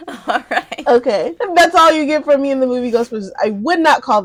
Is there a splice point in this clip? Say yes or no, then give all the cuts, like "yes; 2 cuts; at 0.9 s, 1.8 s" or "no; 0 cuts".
no; 0 cuts